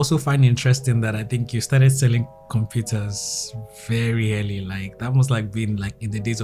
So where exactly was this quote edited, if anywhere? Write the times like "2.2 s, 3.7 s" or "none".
none